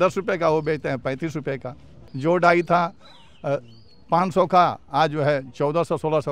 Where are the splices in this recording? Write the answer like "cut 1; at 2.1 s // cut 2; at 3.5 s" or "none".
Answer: cut 1; at 2.1 s